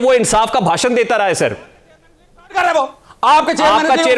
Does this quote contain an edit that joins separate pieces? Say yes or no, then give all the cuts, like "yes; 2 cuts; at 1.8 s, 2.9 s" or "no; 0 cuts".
no; 0 cuts